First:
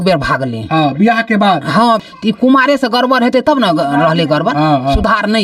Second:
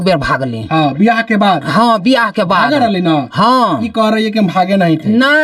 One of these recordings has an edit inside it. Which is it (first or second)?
first